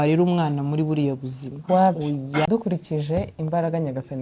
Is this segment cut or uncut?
cut